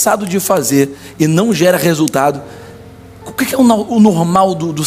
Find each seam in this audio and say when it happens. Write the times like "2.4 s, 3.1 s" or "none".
none